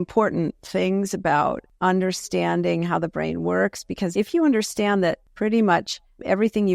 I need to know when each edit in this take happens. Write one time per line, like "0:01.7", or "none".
0:01.7
0:04.1
0:05.3